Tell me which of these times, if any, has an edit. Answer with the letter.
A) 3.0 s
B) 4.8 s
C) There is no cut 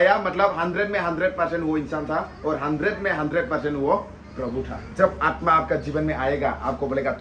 B